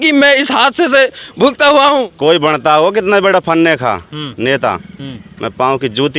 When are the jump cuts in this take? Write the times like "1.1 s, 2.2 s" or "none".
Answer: 2.1 s